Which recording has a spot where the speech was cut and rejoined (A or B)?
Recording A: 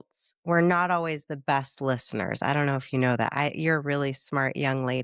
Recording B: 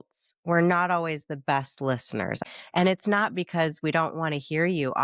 B